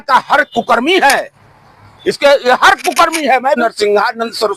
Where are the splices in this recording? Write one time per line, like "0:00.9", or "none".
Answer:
0:03.6